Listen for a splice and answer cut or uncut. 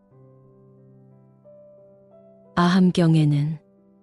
cut